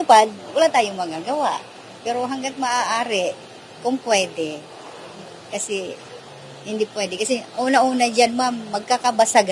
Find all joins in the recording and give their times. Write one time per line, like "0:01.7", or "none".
none